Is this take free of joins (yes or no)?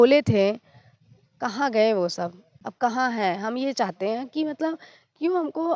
yes